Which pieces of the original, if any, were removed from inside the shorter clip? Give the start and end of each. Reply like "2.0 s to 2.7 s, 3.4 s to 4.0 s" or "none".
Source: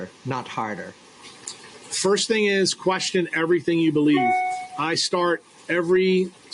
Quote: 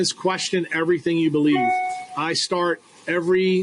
none

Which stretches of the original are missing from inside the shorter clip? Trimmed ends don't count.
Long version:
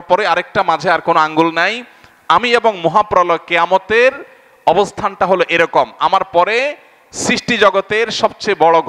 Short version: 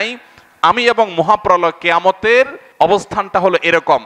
4.3 s to 4.5 s

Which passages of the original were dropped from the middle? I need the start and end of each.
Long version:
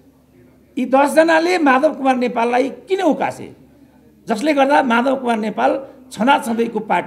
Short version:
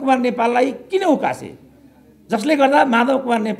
none

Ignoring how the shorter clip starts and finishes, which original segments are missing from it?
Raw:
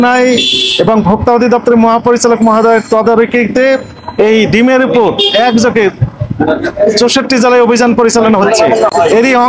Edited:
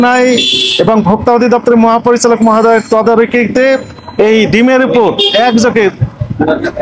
none

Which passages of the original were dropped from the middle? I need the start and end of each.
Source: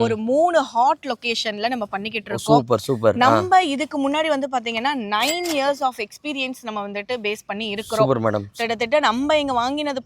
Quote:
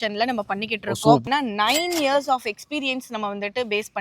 2.7 s to 4.8 s

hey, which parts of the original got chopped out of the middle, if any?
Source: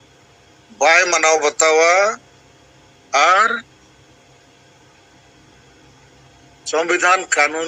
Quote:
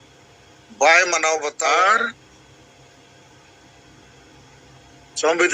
1.5 s to 3.0 s

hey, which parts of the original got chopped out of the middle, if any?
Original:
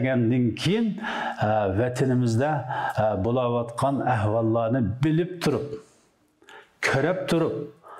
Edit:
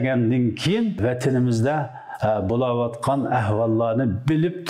1.0 s to 1.7 s

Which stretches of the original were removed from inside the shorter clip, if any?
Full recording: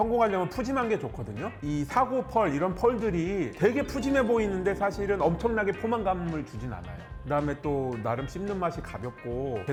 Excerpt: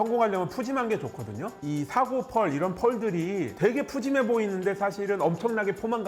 none

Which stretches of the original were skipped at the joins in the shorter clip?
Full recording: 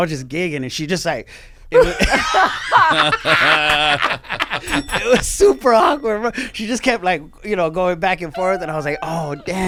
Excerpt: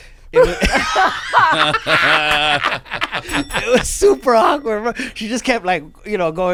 none

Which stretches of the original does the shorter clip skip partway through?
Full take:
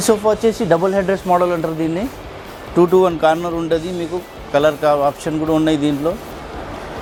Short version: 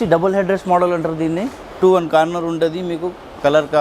2.4 s to 2.9 s

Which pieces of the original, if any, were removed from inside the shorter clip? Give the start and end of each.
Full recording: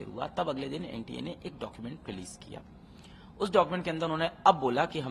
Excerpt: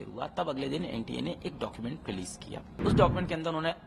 2.7 s to 3.3 s

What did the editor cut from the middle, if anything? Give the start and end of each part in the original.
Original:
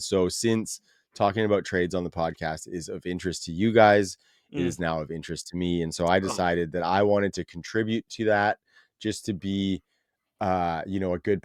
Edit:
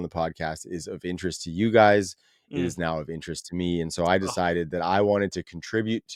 none

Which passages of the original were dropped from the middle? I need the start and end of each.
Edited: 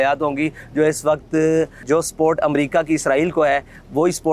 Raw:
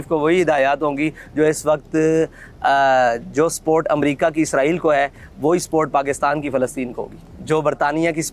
2.4 s to 3.2 s

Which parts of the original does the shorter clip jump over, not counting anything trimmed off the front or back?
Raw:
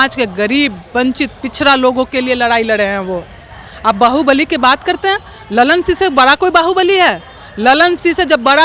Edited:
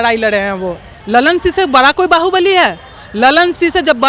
3.4 s to 5.3 s

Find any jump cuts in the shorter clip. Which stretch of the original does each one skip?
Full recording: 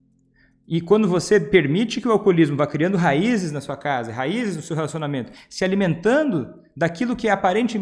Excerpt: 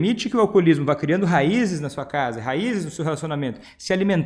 none

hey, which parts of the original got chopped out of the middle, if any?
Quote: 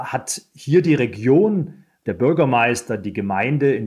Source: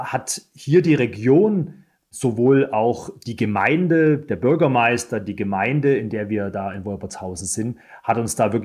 2.1 s to 4.3 s

